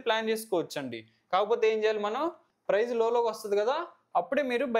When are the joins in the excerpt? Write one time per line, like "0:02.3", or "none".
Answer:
0:02.5